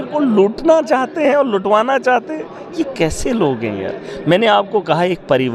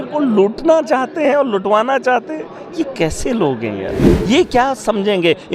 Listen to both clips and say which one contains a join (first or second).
second